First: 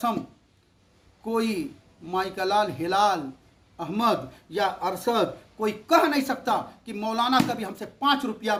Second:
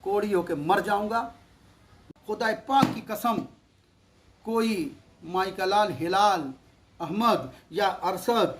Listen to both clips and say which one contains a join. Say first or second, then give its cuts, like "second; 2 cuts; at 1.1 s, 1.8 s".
second; 1 cut; at 2.2 s